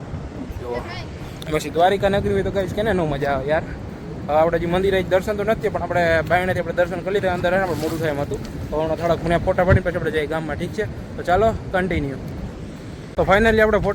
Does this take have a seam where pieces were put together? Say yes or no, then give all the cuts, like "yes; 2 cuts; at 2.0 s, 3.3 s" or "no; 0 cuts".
no; 0 cuts